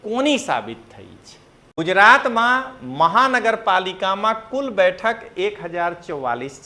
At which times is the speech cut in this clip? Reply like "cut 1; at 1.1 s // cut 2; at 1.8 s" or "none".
cut 1; at 1.8 s